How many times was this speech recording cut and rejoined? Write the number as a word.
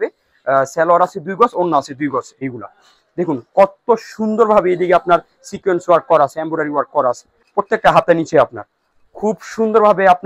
two